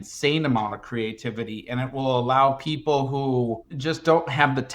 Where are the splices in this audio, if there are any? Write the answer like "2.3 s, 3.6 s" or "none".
3.7 s